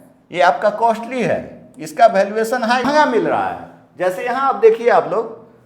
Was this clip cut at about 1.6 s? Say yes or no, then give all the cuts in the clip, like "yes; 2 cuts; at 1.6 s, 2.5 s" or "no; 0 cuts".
no; 1 cut; at 2.8 s